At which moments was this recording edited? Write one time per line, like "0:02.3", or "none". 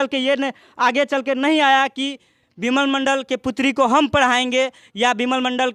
none